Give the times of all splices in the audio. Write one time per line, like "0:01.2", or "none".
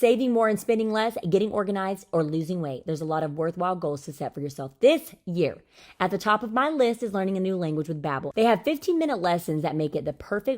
0:08.2